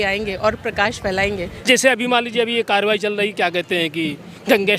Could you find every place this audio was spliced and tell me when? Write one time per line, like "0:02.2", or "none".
0:01.5